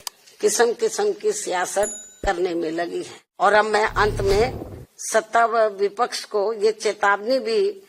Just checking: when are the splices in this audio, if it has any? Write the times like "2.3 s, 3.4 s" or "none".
3.2 s